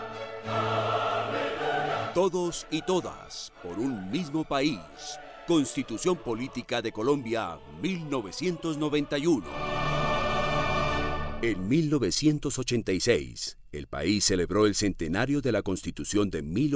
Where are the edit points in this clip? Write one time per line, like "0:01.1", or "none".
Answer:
none